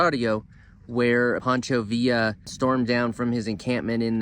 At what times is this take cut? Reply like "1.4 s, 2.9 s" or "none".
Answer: 1.4 s, 2.5 s